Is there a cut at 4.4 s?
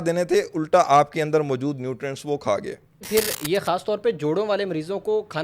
no; 1 cut; at 3.0 s

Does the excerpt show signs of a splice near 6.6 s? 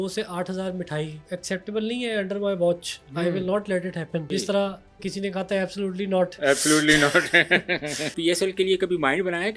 no; 3 cuts; at 1.3 s, 4.3 s, 8.2 s

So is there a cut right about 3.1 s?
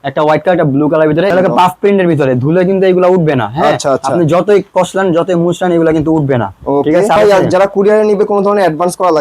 no; 2 cuts; at 1.3 s, 7.2 s

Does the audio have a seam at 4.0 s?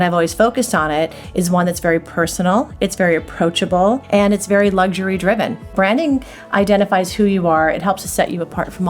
yes; 2 cuts; at 4.0 s, 5.7 s

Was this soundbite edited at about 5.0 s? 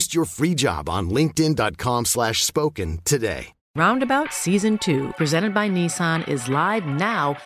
no; 1 cut; at 3.6 s

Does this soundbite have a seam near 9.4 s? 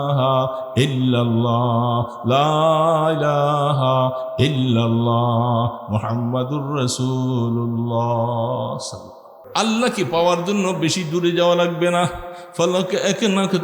yes; 1 cut; at 9.4 s

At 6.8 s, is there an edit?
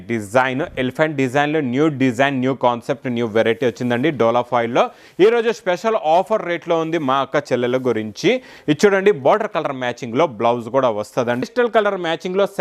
no; 1 cut; at 11.4 s

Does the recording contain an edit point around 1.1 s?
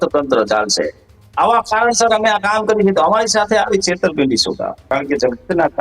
no; 1 cut; at 4.8 s

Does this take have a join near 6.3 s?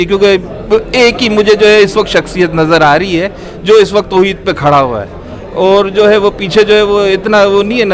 no; 0 cuts

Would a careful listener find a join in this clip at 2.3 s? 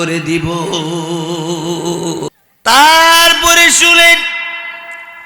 yes; 1 cut; at 2.3 s

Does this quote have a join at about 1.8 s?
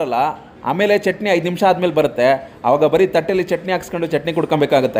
no; 0 cuts

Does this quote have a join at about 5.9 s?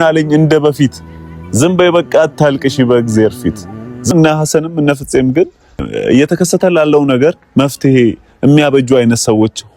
yes; 2 cuts; at 4.1 s, 5.9 s

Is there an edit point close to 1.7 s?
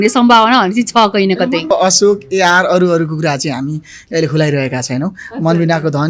yes; 1 cut; at 1.7 s

